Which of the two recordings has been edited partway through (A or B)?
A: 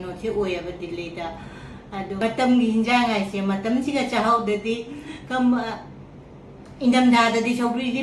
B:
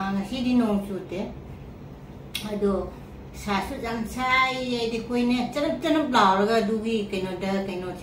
A